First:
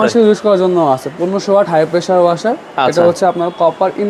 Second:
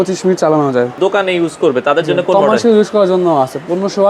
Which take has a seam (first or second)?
second